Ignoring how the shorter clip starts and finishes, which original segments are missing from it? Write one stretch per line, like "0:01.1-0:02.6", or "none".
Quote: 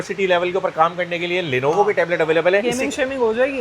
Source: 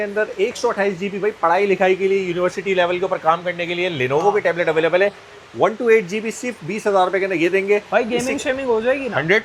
0:05.1-0:08.1